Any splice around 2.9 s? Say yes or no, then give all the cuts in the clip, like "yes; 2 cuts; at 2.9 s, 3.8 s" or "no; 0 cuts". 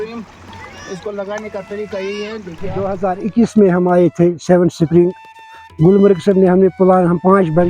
yes; 1 cut; at 2.9 s